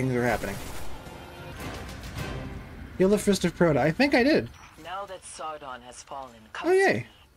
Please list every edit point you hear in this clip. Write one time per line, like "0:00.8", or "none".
0:01.5